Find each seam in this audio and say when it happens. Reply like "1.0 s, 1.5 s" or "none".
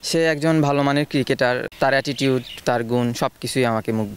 none